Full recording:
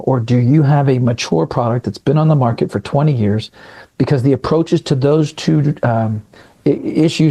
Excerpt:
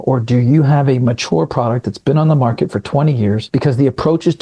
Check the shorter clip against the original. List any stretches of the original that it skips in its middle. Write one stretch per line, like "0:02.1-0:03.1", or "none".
0:03.4-0:03.9